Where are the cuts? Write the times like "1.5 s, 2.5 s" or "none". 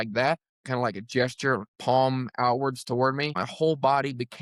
3.4 s